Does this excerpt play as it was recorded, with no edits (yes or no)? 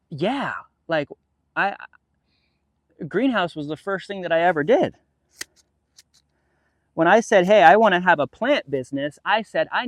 yes